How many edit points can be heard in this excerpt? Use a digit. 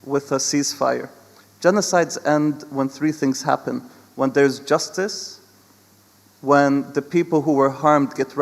0